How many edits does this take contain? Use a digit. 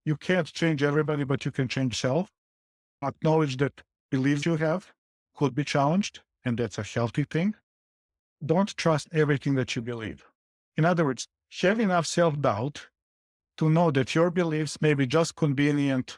2